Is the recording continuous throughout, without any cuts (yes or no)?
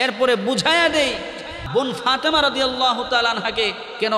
no